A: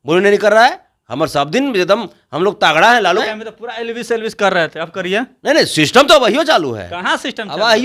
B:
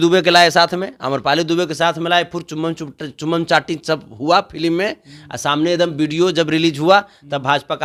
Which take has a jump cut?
A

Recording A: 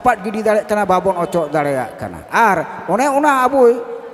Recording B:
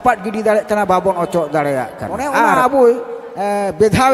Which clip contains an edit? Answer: B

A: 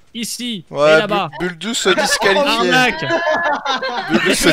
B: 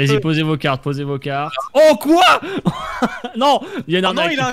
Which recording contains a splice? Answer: B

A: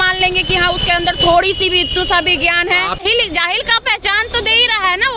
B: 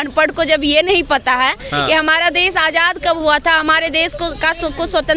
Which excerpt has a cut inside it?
A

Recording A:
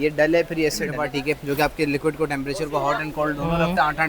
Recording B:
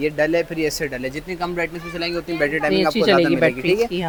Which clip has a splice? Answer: A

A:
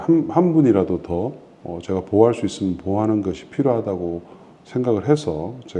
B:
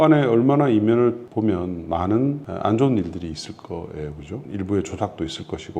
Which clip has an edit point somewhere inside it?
B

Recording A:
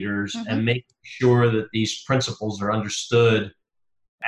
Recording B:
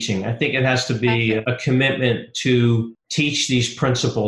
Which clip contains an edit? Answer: B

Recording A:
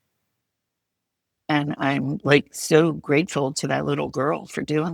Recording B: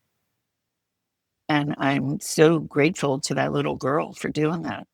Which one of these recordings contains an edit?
B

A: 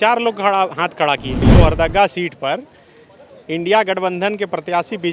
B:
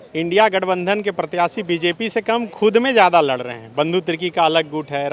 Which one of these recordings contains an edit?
A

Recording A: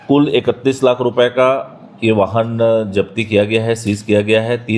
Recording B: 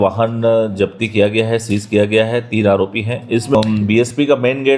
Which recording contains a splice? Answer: B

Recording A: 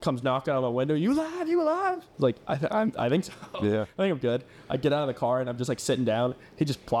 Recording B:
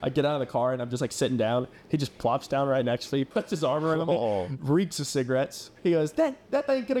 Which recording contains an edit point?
B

